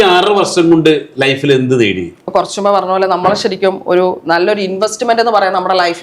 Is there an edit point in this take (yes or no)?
yes